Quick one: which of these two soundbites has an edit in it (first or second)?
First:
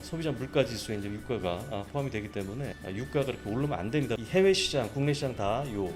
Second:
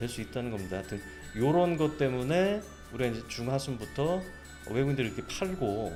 first